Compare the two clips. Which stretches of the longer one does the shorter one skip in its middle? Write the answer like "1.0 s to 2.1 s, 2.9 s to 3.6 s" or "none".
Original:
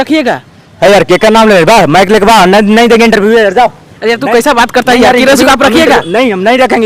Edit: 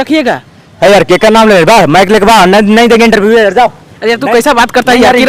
none